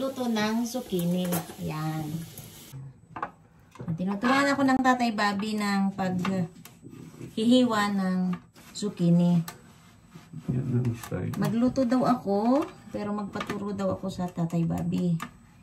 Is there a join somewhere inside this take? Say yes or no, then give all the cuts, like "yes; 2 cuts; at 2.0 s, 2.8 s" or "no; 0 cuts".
yes; 1 cut; at 2.6 s